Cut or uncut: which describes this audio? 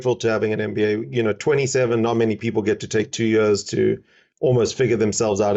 uncut